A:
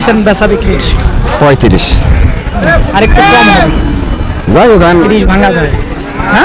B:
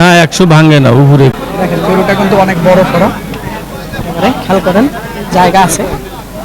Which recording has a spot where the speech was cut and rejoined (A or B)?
B